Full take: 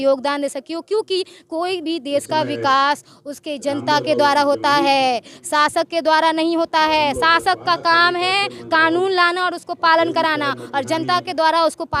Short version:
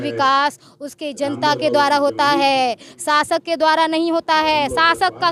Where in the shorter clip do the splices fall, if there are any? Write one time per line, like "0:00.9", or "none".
none